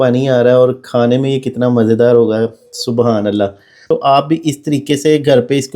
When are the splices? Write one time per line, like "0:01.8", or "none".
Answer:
0:03.8